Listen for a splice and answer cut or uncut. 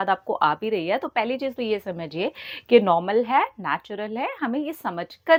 uncut